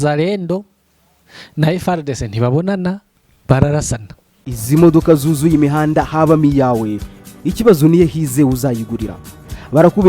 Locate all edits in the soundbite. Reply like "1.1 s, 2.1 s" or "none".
4.5 s